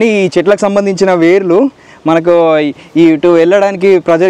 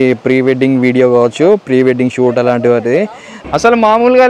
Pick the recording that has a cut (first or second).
second